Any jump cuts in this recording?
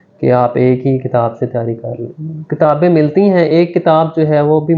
no; 0 cuts

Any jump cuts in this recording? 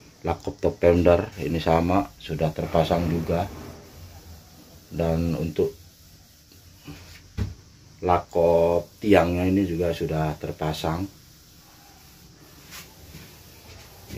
no; 0 cuts

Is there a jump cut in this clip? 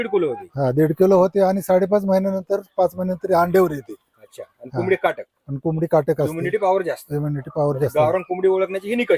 no; 0 cuts

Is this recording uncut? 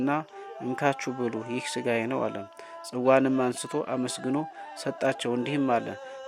yes; 0 cuts

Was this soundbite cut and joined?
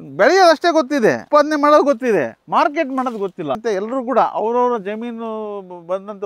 yes; 2 cuts; at 1.2 s, 3.6 s

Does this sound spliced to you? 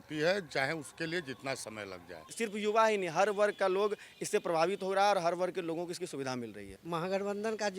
yes; 2 cuts; at 2.3 s, 6.7 s

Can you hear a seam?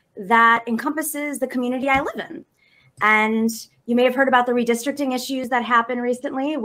yes; 1 cut; at 4.5 s

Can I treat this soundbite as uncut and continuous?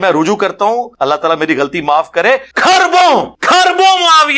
no; 3 cuts; at 0.9 s, 2.5 s, 3.3 s

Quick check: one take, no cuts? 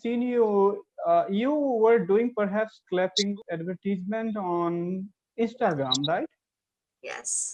no; 1 cut; at 3.3 s

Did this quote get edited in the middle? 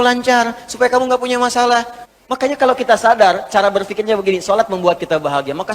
yes; 1 cut; at 2.0 s

